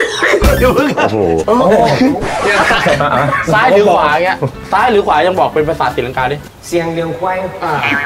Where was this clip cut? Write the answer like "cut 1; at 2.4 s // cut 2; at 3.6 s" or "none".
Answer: cut 1; at 1.4 s